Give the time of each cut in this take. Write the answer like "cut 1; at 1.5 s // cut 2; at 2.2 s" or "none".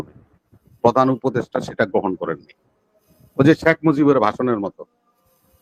none